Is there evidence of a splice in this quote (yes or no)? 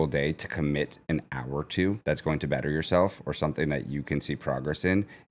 yes